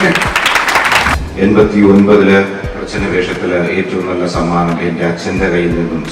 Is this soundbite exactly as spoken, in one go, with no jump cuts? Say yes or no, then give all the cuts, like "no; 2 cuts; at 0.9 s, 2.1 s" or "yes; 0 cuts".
no; 1 cut; at 1.1 s